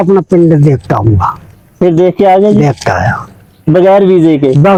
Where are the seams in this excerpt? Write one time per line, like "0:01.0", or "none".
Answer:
none